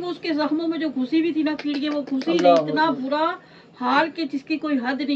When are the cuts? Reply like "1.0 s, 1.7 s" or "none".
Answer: none